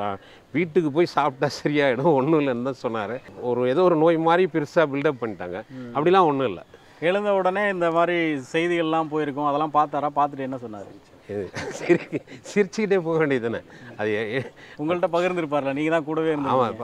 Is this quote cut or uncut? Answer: cut